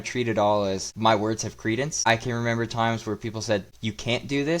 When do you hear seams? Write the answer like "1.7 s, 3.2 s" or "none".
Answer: 0.9 s, 2.0 s, 3.7 s